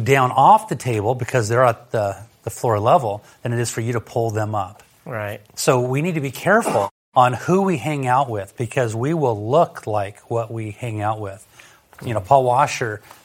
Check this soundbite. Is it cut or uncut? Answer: cut